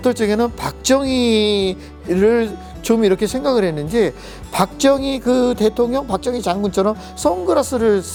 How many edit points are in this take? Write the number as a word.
zero